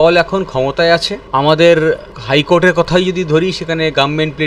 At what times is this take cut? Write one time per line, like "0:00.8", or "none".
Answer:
0:01.2
0:02.1